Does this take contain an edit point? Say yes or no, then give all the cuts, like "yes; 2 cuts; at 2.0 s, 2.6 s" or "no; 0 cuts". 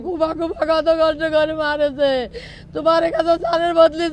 no; 0 cuts